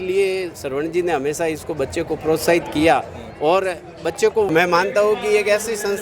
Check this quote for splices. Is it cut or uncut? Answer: cut